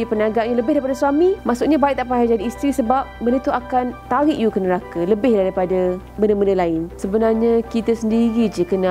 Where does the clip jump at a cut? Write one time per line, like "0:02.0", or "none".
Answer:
0:01.4
0:04.0
0:06.0
0:07.0

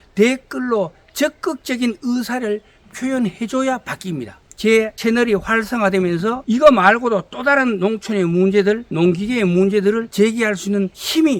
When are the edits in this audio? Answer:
none

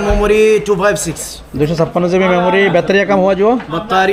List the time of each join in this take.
none

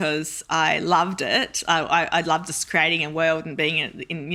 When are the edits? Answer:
none

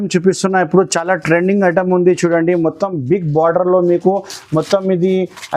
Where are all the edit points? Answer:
none

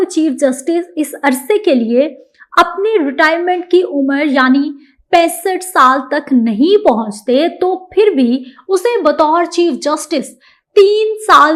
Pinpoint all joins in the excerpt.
none

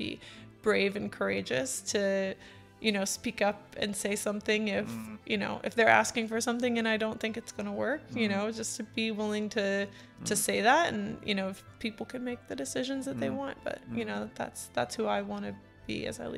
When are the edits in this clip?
none

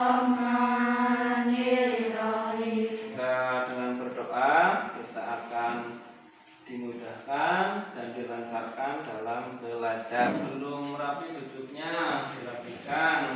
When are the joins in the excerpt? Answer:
0:03.1
0:10.3

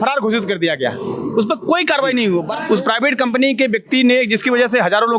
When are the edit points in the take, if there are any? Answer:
0:02.5

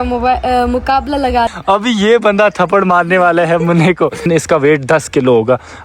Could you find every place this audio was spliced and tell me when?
0:01.6
0:04.3

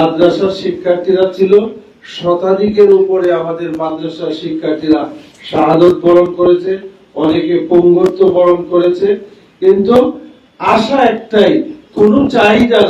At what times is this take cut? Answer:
none

